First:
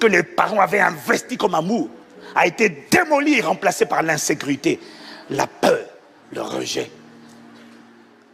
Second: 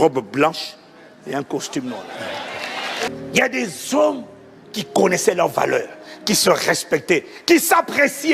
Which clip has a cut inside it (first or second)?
second